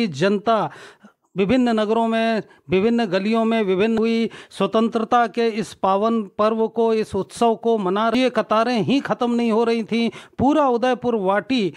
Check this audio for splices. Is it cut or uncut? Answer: cut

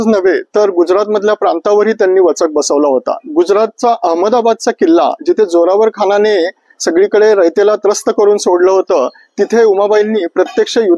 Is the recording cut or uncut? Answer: uncut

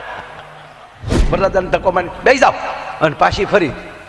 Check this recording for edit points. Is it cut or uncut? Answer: cut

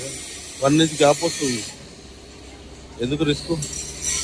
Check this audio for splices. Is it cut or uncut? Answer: uncut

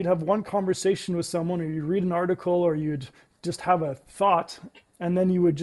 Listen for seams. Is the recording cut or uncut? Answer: uncut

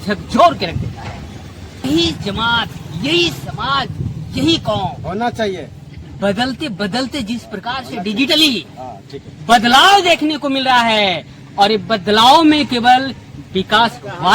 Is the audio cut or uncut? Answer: cut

